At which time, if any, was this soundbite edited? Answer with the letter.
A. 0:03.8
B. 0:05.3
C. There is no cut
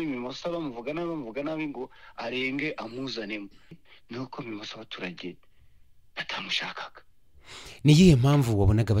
A